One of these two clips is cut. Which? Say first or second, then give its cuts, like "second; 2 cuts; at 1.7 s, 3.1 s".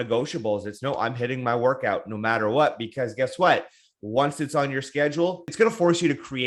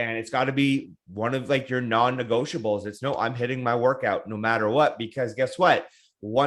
first; 1 cut; at 5.5 s